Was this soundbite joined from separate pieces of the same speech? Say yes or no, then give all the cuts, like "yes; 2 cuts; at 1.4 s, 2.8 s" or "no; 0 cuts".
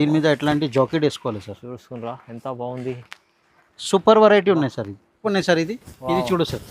yes; 1 cut; at 5.3 s